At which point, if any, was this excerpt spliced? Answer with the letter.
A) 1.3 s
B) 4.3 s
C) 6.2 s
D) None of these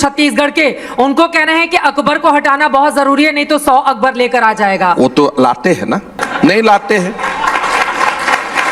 C